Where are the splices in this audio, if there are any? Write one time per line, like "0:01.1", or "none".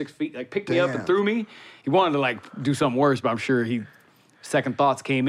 none